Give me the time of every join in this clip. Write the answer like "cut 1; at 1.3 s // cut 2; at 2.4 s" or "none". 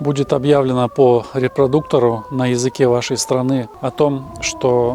cut 1; at 3.7 s